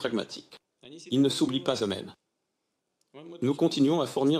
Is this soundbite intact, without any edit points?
yes; 0 cuts

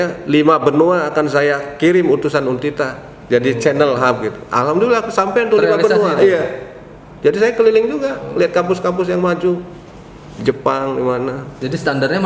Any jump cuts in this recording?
no; 0 cuts

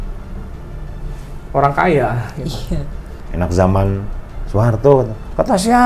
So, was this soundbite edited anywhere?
yes; 1 cut; at 3.2 s

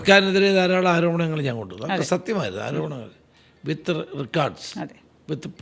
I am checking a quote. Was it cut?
no; 0 cuts

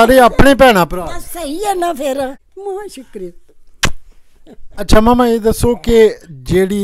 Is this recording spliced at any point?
yes; 1 cut; at 2.5 s

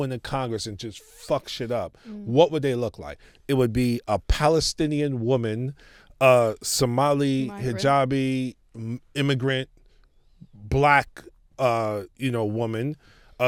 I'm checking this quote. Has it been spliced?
no; 0 cuts

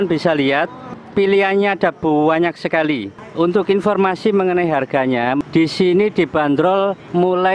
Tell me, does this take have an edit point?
yes; 2 cuts; at 3.2 s, 5.4 s

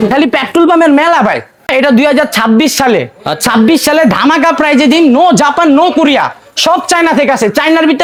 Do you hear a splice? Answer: no; 0 cuts

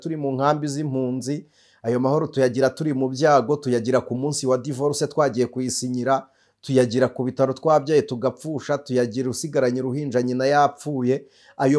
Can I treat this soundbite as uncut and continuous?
yes; 0 cuts

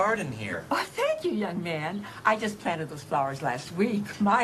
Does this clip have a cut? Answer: no; 0 cuts

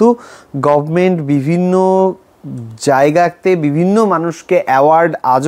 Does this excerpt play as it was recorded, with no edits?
yes; 0 cuts

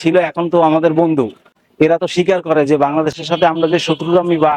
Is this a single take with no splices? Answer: yes; 0 cuts

